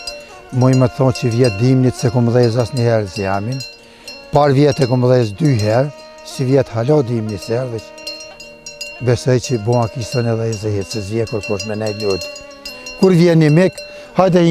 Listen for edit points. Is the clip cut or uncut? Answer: uncut